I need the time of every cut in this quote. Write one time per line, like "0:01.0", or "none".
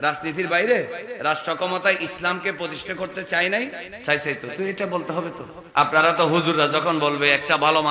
0:01.1
0:03.9
0:05.5